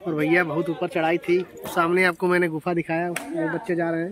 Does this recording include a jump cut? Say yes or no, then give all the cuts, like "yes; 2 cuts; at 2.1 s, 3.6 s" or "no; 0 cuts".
no; 0 cuts